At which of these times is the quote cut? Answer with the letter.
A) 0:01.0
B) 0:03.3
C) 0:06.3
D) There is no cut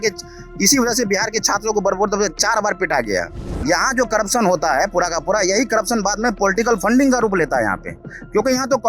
B